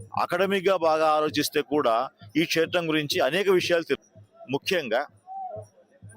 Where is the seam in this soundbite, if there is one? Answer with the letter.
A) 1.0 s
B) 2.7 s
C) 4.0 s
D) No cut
C